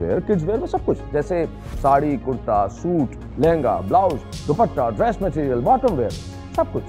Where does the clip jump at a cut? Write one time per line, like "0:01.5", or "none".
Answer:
none